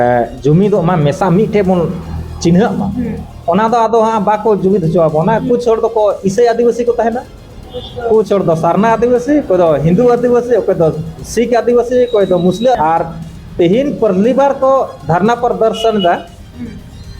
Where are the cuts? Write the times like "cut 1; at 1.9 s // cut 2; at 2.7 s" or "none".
cut 1; at 12.8 s